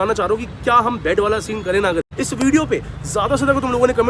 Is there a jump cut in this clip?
yes; 1 cut; at 2.1 s

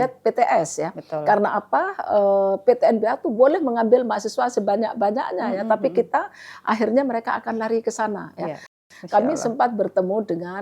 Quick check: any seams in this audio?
yes; 1 cut; at 8.8 s

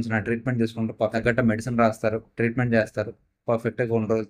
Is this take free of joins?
yes; 0 cuts

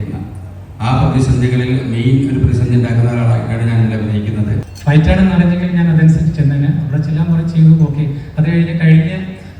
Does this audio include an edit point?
yes; 1 cut; at 4.7 s

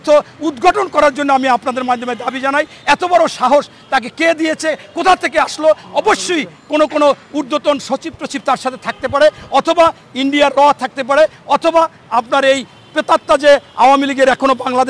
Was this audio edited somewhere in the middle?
no; 0 cuts

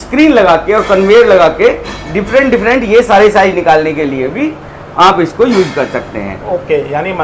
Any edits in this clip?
no; 0 cuts

